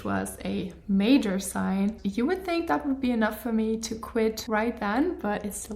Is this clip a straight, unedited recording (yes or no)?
no